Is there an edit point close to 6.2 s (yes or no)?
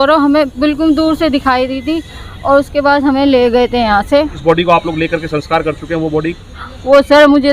no